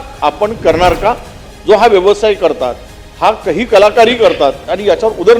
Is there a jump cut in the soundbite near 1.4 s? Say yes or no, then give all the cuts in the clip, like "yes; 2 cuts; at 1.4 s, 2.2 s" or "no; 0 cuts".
yes; 1 cut; at 1.4 s